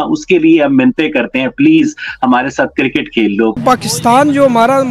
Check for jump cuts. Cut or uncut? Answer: cut